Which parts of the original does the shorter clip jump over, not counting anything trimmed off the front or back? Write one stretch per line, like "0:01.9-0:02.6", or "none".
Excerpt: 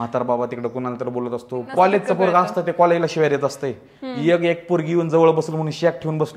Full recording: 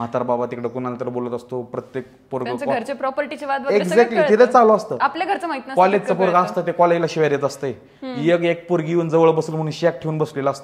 0:01.6-0:05.6